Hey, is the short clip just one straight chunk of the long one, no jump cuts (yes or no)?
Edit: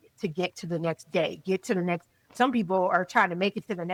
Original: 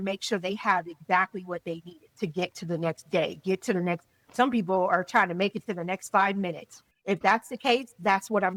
yes